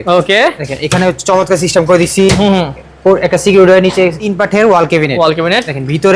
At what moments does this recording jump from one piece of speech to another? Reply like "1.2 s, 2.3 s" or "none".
4.2 s